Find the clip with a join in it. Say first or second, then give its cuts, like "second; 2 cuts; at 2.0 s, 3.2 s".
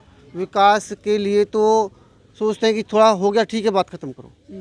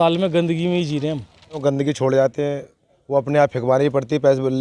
second; 1 cut; at 1.6 s